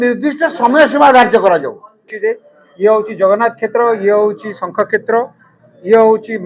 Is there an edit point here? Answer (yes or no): yes